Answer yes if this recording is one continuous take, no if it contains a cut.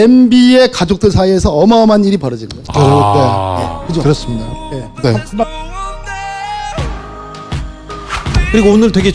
no